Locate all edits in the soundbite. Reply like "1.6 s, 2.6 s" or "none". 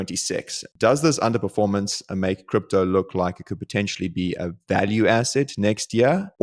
none